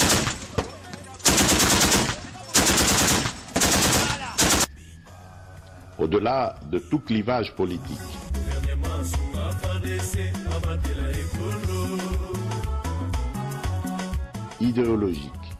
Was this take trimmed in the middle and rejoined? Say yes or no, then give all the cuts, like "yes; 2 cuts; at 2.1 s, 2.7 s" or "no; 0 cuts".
no; 0 cuts